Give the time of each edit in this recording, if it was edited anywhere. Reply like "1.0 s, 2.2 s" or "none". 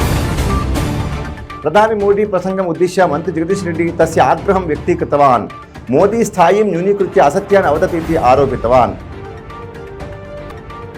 1.6 s, 9.0 s

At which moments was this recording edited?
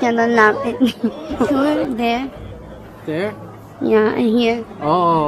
1.5 s

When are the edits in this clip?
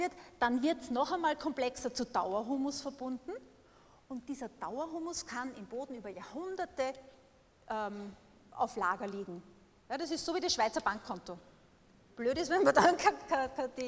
none

